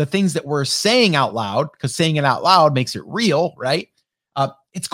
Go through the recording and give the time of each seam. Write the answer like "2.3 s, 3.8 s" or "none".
none